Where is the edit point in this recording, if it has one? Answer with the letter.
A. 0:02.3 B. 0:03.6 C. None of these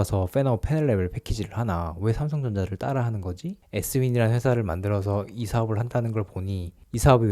B